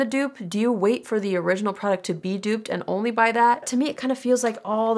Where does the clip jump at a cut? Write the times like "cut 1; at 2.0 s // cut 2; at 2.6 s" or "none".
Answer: cut 1; at 3.7 s